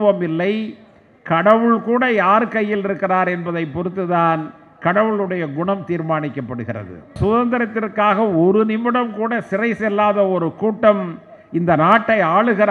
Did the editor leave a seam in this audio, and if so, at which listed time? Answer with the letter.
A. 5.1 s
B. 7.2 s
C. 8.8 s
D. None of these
B